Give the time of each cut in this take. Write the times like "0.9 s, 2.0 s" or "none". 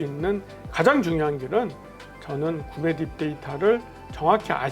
none

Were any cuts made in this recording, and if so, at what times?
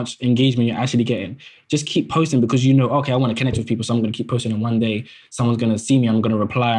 none

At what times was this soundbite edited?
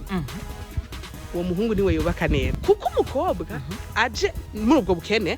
2.5 s

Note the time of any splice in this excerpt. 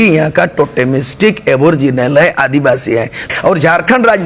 3.2 s

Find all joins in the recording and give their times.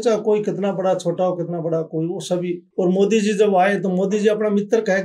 2.6 s

